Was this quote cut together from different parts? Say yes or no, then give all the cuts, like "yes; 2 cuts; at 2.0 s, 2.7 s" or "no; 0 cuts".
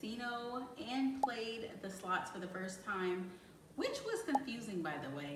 no; 0 cuts